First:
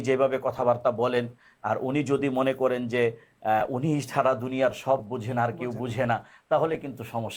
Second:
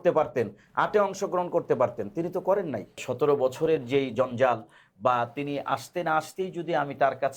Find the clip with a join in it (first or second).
second